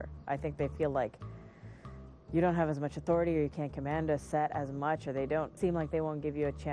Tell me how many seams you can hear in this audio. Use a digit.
1